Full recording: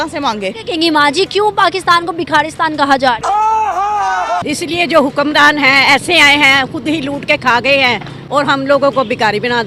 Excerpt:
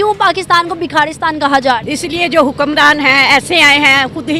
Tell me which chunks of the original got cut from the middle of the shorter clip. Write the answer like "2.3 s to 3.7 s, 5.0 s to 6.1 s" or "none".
3.2 s to 4.4 s

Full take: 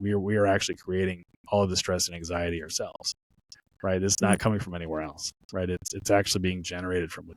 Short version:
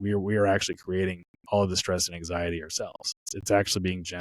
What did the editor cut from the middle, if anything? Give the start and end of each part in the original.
3.3 s to 5.9 s

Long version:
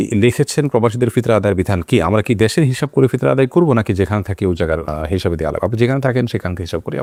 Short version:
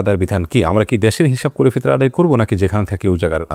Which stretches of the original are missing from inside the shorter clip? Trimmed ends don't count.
none

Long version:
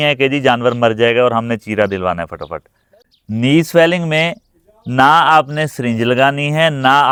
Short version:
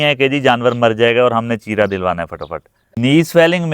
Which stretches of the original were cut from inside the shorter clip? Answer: 2.8 s to 3.2 s

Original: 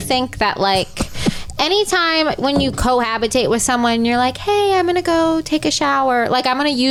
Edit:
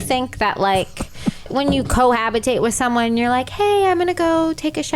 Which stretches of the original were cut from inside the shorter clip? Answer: 1.5 s to 2.4 s

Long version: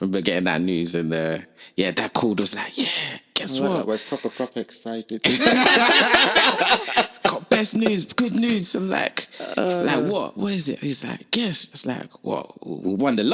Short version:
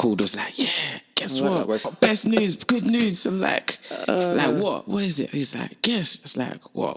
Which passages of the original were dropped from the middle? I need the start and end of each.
4.1 s to 7.4 s

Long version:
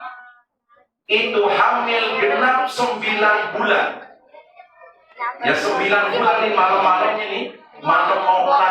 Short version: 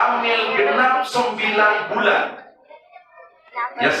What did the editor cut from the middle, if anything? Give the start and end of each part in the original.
none

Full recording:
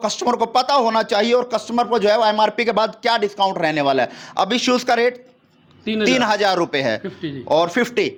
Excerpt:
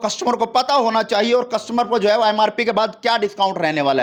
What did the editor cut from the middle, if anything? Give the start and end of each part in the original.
none

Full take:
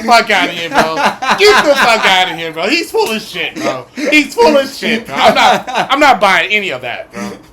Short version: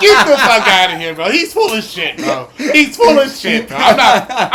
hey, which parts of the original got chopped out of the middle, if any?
none

